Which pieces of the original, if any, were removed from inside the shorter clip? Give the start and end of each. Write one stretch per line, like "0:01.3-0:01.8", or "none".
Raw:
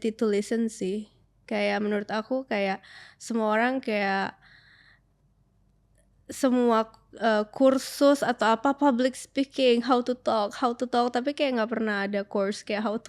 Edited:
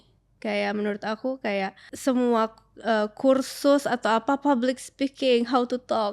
0:02.9-0:06.2